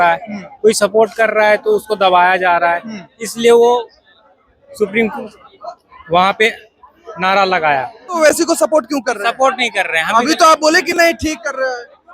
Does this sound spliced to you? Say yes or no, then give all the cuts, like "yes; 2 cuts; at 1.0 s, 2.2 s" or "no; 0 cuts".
yes; 1 cut; at 8.2 s